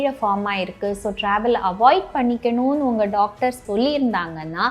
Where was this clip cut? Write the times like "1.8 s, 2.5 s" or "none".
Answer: 3.6 s